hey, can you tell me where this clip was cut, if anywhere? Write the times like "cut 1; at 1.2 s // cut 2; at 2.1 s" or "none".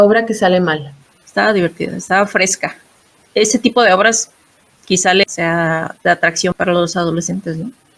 cut 1; at 5.2 s // cut 2; at 6.5 s